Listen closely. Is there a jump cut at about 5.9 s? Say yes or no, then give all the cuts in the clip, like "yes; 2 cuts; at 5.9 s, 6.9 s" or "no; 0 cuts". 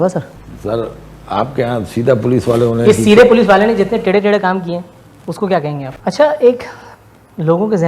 yes; 1 cut; at 5.9 s